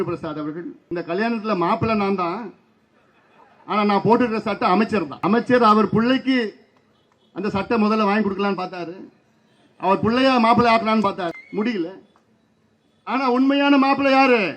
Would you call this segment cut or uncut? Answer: cut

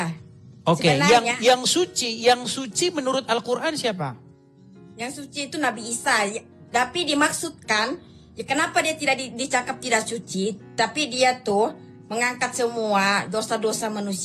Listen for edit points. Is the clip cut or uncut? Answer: uncut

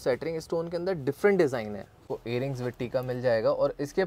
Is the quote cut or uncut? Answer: cut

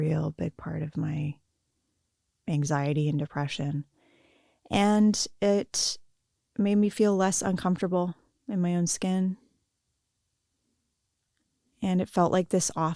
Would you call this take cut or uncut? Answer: uncut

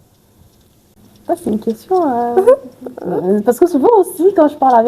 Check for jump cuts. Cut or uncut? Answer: uncut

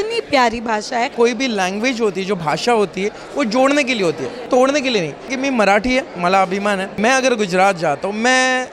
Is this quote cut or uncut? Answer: cut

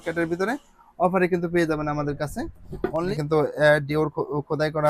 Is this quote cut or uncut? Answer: cut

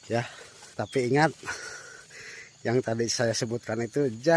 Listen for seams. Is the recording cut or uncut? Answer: uncut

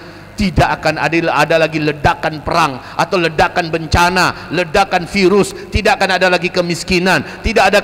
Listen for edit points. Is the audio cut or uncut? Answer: uncut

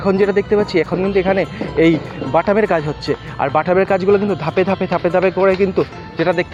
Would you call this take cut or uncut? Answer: uncut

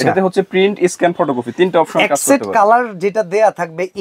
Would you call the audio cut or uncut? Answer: uncut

